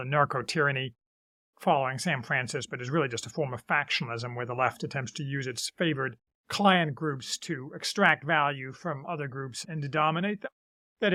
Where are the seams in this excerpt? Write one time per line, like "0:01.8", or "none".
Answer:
none